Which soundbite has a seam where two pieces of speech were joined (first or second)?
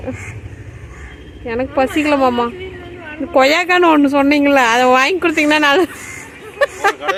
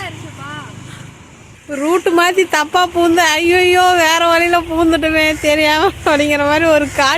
second